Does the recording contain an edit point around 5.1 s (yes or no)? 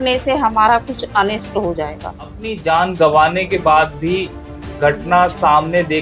no